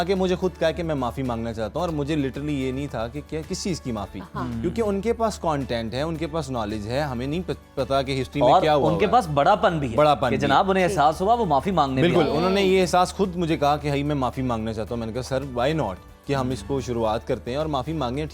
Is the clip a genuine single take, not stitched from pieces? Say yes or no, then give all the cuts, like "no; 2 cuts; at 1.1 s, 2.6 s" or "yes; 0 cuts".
yes; 0 cuts